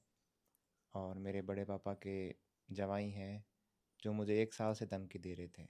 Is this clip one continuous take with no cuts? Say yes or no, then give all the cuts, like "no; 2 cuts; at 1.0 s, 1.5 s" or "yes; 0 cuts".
yes; 0 cuts